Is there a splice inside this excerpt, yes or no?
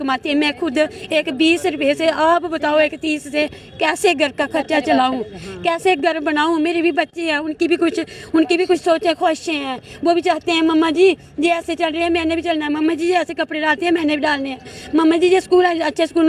no